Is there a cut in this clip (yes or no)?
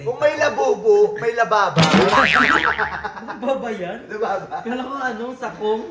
no